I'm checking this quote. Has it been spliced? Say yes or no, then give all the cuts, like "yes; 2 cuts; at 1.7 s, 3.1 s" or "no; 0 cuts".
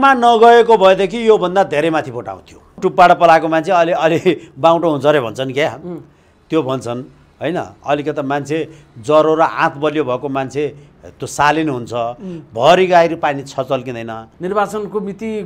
yes; 2 cuts; at 2.7 s, 14.2 s